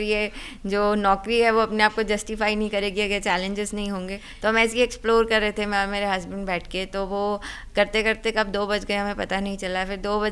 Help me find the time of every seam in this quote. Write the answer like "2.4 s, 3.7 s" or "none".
4.2 s